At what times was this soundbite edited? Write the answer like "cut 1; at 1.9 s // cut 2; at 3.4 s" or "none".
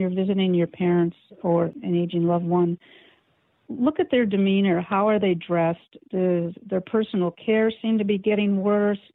cut 1; at 1.8 s

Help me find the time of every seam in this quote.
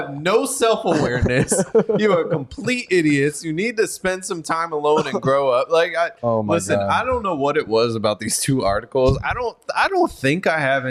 none

